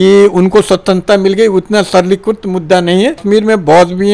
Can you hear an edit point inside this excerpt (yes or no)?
yes